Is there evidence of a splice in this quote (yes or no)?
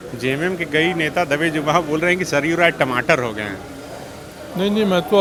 no